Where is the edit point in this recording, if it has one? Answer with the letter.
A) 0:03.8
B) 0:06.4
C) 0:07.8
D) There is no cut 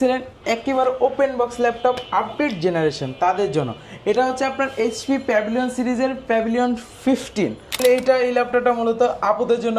C